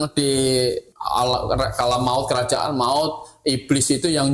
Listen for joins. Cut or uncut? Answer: cut